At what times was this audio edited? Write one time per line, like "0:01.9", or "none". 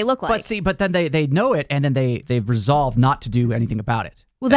0:02.2